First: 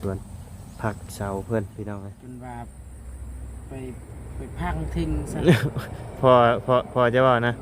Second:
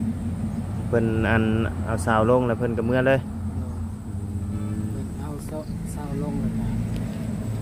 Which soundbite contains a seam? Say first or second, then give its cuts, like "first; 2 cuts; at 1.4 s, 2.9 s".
first; 1 cut; at 2.1 s